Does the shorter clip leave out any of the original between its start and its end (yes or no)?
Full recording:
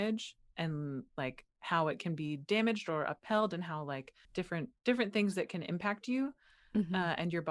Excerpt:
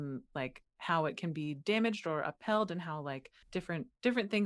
no